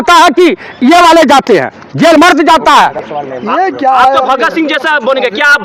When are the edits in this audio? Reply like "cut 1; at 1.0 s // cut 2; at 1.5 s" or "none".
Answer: none

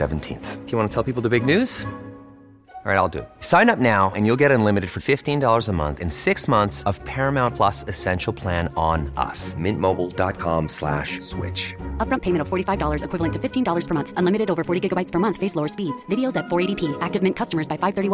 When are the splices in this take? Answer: none

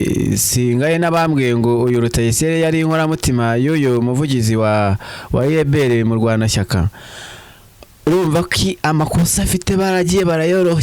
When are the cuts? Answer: none

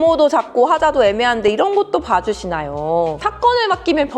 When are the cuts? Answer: cut 1; at 3.2 s

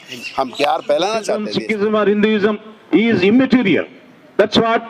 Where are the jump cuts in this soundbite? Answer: cut 1; at 1.5 s

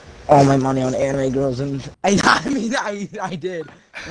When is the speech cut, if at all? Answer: cut 1; at 1.8 s

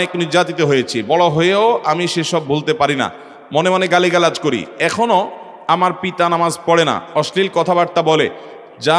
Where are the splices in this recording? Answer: none

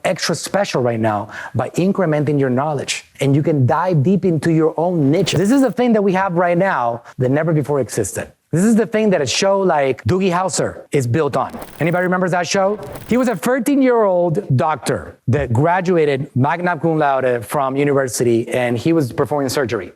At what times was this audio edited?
cut 1; at 5.4 s // cut 2; at 12.9 s

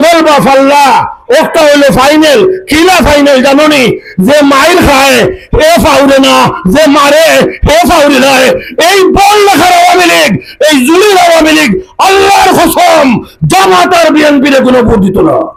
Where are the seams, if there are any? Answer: none

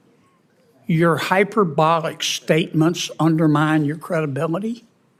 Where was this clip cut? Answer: none

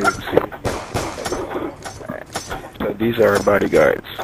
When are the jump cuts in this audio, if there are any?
cut 1; at 3.3 s

